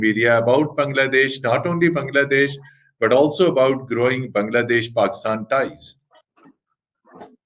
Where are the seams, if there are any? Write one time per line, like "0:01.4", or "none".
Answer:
none